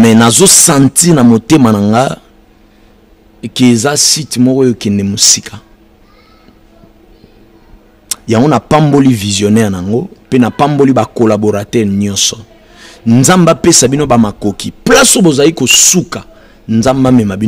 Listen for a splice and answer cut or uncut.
uncut